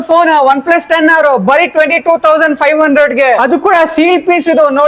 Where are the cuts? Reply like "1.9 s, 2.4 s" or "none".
3.4 s

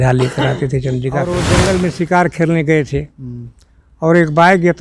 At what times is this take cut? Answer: 1.3 s

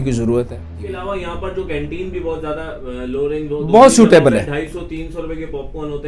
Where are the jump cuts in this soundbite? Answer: 1.0 s

